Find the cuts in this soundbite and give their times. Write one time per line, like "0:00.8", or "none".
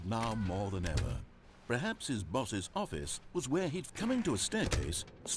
0:03.9